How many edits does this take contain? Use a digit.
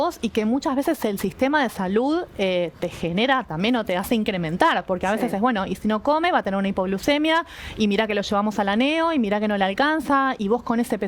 0